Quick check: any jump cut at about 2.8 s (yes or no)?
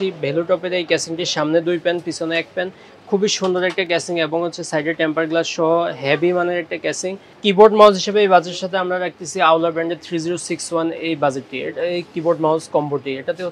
no